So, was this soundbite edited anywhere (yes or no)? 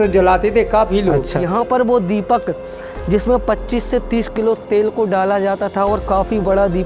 yes